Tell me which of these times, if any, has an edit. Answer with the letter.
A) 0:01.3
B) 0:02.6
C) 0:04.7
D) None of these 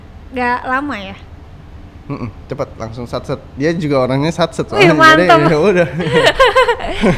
D